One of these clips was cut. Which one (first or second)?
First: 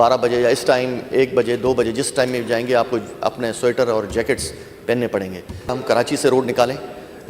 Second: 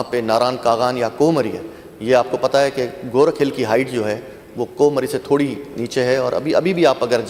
first